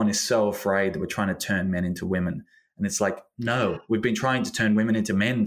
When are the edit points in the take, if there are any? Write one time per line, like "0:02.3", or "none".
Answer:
none